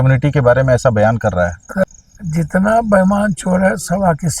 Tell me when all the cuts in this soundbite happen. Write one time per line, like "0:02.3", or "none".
0:01.8